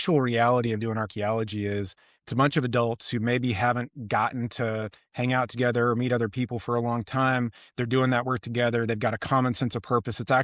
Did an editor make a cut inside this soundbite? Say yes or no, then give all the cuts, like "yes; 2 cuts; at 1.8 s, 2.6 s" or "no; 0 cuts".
no; 0 cuts